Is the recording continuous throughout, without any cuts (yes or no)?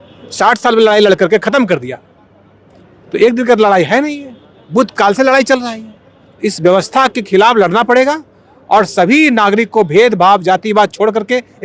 yes